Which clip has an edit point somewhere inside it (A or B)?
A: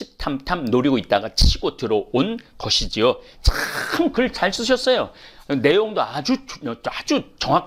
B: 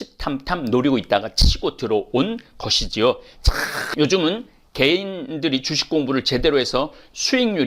B